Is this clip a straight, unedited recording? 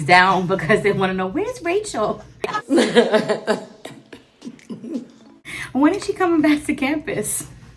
yes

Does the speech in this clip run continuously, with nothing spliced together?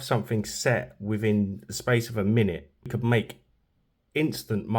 no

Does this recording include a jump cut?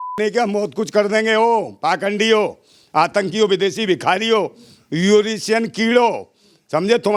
no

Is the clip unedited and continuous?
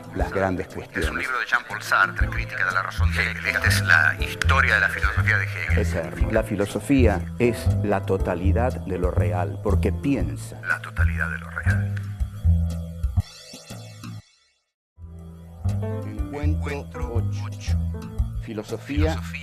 yes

